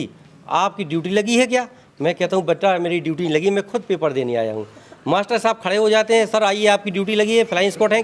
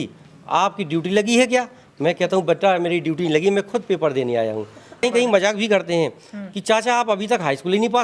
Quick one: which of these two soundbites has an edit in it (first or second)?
second